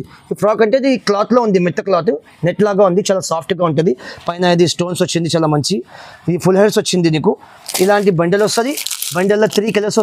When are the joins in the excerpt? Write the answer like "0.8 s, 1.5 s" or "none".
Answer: none